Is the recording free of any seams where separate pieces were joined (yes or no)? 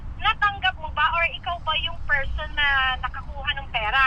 yes